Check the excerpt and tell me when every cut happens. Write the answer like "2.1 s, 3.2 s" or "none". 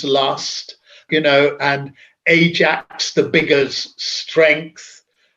none